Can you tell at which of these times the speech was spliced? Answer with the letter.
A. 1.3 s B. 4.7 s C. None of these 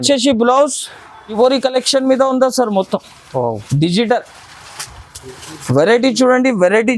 A